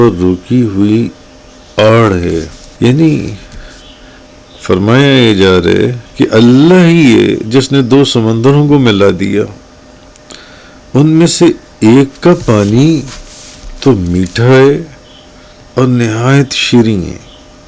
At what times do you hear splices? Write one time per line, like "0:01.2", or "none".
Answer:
0:02.6
0:06.0